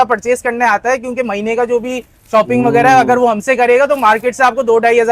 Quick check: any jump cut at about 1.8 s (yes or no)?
no